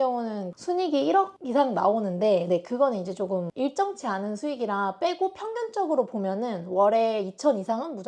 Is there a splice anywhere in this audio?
no; 0 cuts

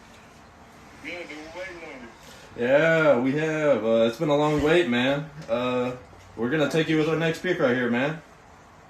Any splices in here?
no; 0 cuts

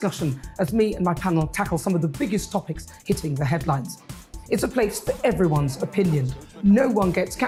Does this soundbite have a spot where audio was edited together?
no; 0 cuts

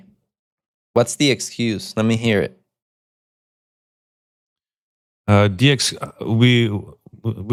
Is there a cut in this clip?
no; 0 cuts

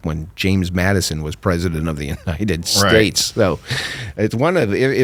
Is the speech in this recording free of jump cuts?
yes; 0 cuts

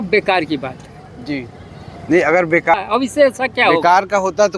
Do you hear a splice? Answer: yes; 1 cut; at 2.7 s

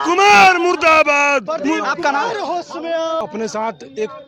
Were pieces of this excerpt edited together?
no; 0 cuts

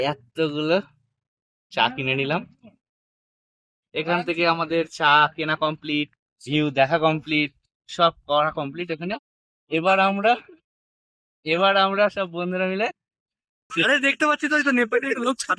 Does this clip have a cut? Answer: yes; 1 cut; at 13.7 s

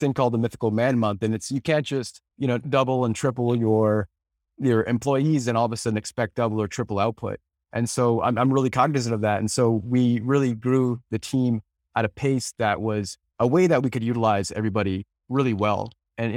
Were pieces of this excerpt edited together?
yes; 1 cut; at 13.2 s

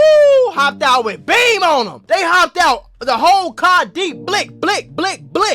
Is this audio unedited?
no; 1 cut; at 2.0 s

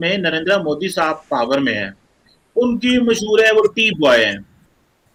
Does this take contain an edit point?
no; 0 cuts

